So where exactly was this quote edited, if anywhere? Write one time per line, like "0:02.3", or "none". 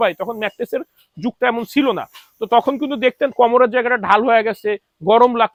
none